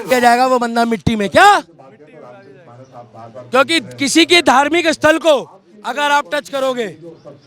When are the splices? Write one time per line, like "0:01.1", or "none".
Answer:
none